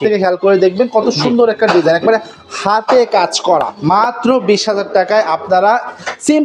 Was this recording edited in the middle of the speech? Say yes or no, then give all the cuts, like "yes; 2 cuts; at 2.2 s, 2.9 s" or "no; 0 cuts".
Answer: yes; 1 cut; at 3.7 s